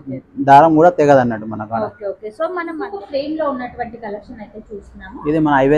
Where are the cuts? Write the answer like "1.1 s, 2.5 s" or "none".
2.7 s